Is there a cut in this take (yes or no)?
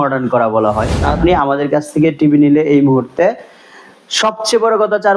yes